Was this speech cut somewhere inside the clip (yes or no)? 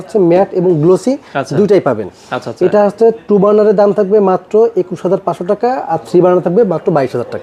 no